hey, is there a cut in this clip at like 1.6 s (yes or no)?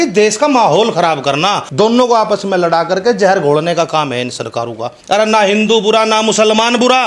yes